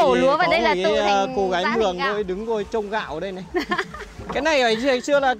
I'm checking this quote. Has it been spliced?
no; 0 cuts

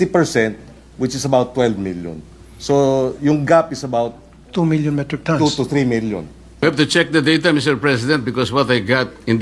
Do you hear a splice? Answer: yes; 1 cut; at 6.6 s

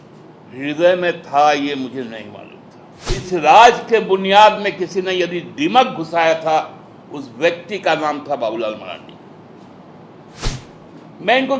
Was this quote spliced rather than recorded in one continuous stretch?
yes; 2 cuts; at 3.2 s, 10.4 s

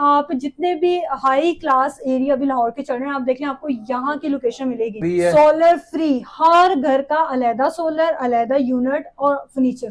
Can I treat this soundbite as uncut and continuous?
no; 1 cut; at 5.0 s

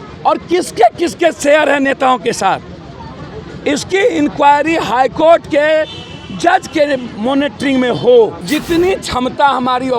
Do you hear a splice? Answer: yes; 1 cut; at 8.4 s

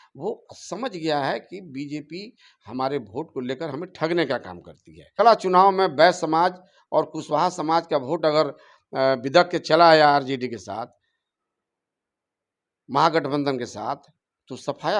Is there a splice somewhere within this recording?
yes; 1 cut; at 5.2 s

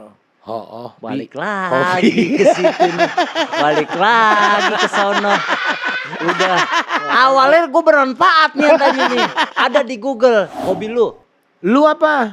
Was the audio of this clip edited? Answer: yes; 1 cut; at 10.6 s

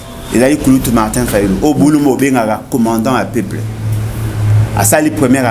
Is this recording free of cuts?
yes; 0 cuts

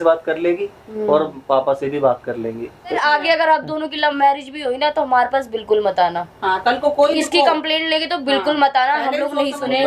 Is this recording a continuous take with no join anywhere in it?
no; 1 cut; at 3.0 s

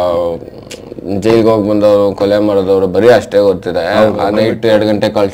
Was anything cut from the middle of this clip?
yes; 1 cut; at 4.3 s

